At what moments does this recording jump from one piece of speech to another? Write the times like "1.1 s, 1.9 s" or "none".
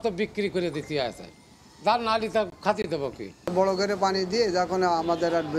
3.3 s